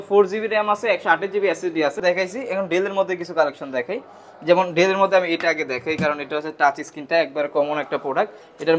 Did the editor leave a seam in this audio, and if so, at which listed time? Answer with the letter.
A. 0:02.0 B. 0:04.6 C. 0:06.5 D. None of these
A